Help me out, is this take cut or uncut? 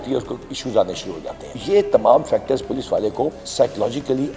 cut